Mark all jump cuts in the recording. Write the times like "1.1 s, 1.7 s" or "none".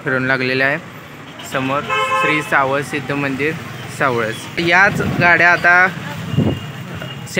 4.6 s